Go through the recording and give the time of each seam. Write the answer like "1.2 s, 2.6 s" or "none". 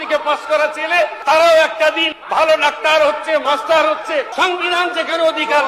1.2 s, 2.1 s, 3.4 s, 4.3 s